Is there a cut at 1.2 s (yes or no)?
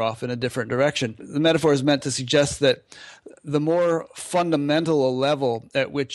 yes